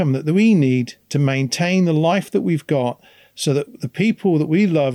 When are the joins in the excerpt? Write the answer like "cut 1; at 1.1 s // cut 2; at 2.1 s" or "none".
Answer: none